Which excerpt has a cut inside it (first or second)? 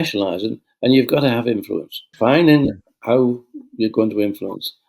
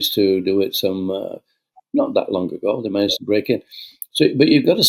first